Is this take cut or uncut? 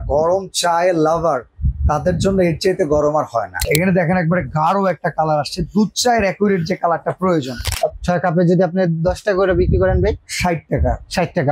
cut